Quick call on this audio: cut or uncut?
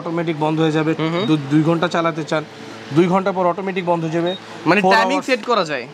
uncut